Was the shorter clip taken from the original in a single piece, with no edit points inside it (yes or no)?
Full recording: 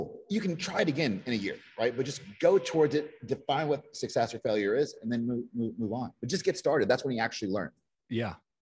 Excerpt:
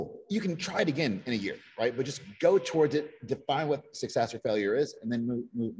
yes